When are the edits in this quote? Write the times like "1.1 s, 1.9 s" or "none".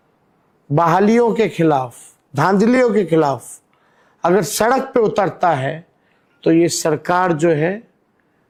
none